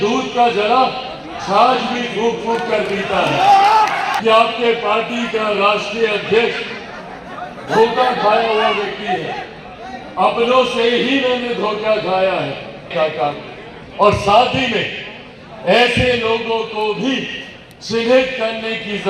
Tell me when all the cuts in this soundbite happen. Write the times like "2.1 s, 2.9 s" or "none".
4.2 s, 12.9 s